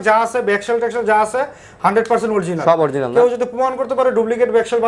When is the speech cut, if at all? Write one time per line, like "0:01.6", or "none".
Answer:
none